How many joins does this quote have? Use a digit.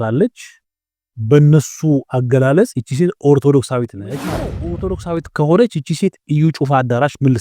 1